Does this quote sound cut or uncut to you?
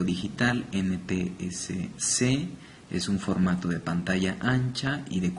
cut